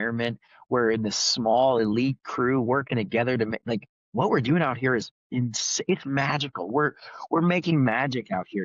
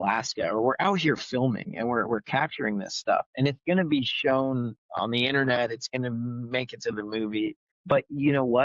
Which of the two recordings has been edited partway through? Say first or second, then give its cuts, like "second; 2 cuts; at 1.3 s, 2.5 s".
second; 1 cut; at 7.7 s